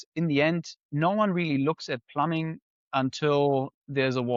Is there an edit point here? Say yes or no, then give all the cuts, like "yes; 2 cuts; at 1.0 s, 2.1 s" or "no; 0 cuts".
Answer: no; 0 cuts